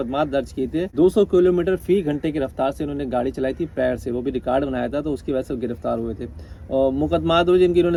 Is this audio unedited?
yes; 0 cuts

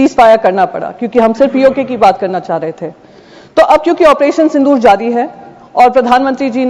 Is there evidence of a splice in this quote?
no; 0 cuts

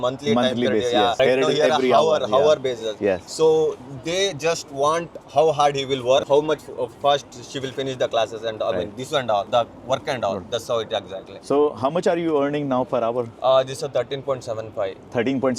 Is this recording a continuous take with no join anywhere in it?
yes; 0 cuts

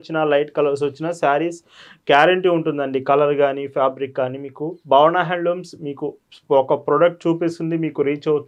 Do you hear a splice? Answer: no; 0 cuts

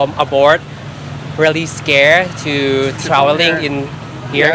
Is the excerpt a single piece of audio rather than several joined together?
yes; 0 cuts

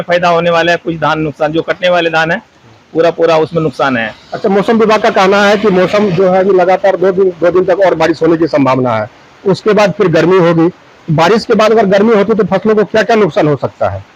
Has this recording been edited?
no; 0 cuts

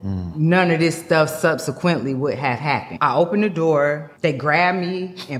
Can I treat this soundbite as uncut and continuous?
no; 2 cuts; at 2.9 s, 4.1 s

